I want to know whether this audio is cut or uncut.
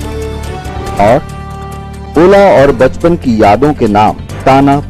cut